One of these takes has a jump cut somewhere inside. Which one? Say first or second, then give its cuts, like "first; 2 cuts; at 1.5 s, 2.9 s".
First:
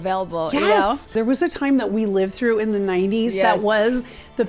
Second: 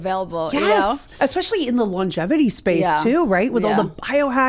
first; 1 cut; at 1.1 s